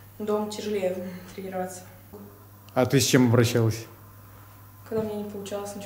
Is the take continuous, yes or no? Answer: no